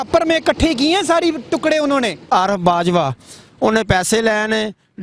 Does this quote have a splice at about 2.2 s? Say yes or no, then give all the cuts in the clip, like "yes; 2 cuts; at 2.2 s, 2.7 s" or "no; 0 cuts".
yes; 1 cut; at 2.2 s